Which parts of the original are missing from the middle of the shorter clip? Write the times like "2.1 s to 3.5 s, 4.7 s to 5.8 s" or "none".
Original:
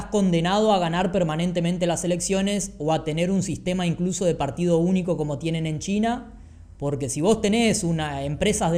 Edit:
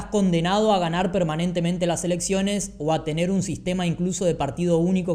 none